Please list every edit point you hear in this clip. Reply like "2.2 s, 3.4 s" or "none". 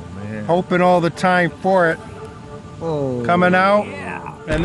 none